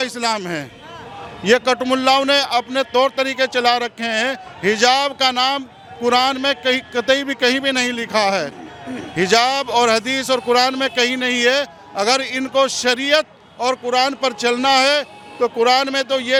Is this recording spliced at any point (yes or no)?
no